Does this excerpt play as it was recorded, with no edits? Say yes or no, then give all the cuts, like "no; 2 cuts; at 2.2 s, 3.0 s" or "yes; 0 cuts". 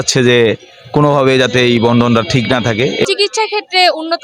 no; 1 cut; at 3.1 s